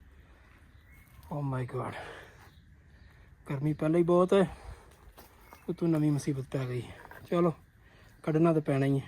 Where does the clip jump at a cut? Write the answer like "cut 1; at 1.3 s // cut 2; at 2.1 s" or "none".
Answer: none